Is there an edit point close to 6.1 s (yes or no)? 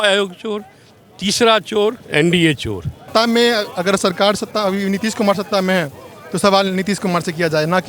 no